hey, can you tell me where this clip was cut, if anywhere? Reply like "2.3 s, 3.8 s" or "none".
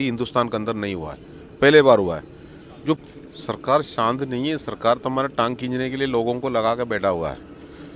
3.0 s